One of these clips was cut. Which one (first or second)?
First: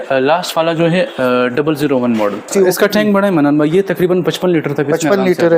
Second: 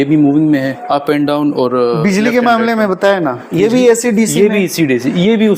first